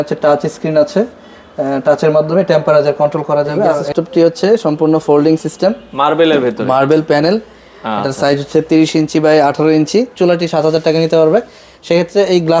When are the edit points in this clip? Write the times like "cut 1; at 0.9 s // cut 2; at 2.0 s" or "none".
cut 1; at 3.9 s // cut 2; at 10.1 s